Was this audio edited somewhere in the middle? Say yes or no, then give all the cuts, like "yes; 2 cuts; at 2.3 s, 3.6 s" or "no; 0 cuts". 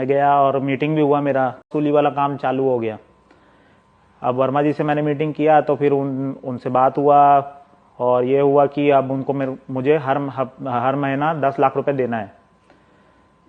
yes; 1 cut; at 1.7 s